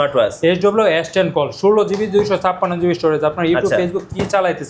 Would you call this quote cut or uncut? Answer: uncut